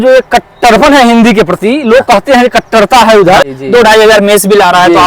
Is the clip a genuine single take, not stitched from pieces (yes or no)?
no